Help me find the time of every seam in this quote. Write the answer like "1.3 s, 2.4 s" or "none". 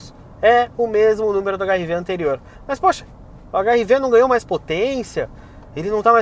none